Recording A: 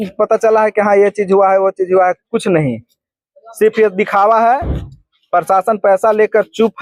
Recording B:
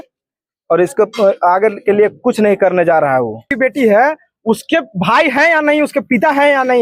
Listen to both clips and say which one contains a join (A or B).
B